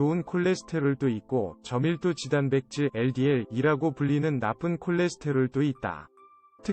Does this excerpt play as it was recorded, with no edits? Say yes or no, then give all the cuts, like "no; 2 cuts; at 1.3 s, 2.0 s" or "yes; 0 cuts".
yes; 0 cuts